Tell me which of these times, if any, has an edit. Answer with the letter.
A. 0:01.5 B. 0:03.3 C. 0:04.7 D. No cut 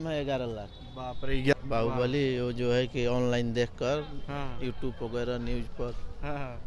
A